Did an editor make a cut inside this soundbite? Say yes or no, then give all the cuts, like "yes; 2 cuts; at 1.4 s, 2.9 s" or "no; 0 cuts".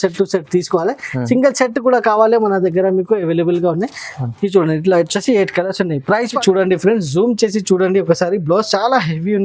yes; 1 cut; at 6.4 s